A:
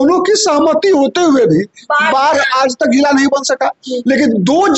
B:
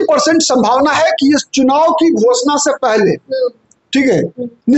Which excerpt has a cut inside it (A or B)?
A